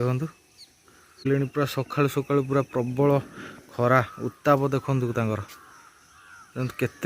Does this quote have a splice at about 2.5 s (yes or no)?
no